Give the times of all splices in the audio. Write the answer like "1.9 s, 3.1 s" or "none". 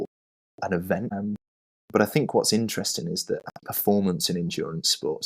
1.1 s, 3.5 s